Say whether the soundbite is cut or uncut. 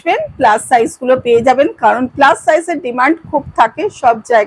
uncut